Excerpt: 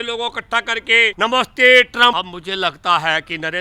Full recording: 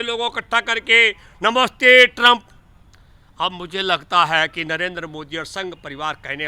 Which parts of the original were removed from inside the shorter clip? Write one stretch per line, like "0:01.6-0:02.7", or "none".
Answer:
0:01.1-0:01.4
0:02.4-0:03.4